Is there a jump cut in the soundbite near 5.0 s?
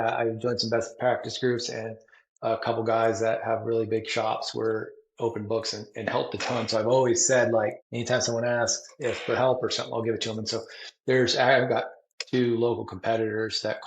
no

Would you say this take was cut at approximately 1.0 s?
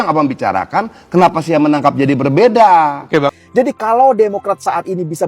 no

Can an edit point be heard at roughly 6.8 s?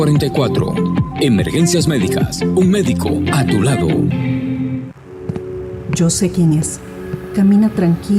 no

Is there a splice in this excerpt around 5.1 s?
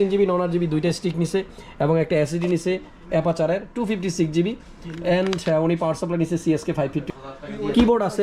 no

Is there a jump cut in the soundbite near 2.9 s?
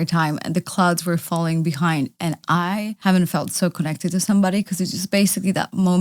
yes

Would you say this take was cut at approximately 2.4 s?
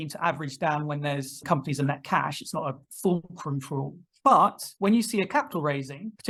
no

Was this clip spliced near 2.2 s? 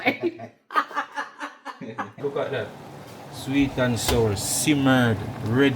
yes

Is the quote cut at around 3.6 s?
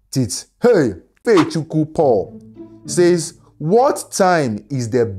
no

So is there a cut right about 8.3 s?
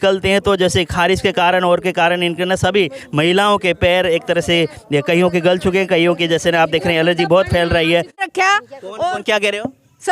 yes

